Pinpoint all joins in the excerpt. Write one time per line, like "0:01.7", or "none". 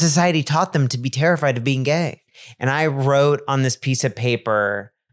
0:02.1